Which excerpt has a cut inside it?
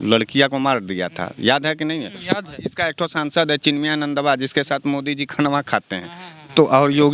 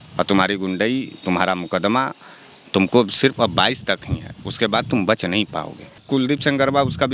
second; 1 cut; at 5.9 s

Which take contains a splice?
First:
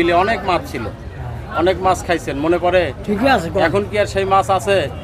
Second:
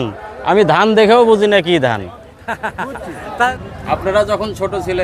second; 1 cut; at 3.5 s

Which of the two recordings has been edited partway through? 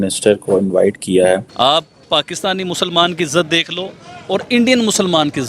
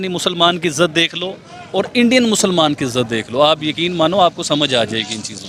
first; 1 cut; at 1.5 s

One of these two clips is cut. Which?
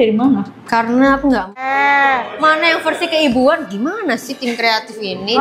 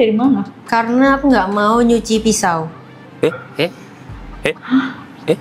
first; 1 cut; at 1.6 s

